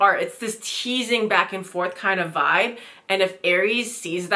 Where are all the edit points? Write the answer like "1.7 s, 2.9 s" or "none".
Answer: none